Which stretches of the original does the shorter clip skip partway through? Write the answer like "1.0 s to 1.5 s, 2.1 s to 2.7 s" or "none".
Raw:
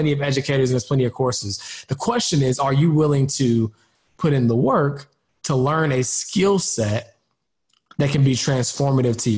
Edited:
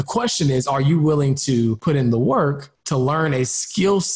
3.7 s to 4.2 s, 5.1 s to 5.3 s